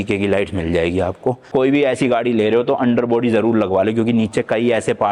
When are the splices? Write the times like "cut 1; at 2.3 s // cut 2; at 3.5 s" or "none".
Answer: cut 1; at 1.4 s